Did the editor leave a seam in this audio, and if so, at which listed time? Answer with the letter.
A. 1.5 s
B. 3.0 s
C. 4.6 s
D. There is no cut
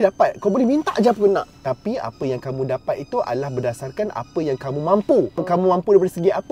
A